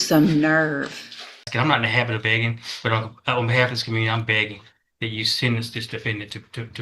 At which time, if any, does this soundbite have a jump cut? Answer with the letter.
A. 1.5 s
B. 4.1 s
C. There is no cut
A